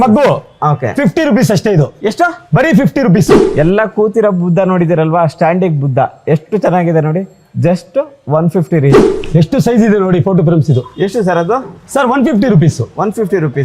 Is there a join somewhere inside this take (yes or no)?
yes